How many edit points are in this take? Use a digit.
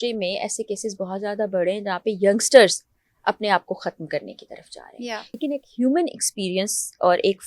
1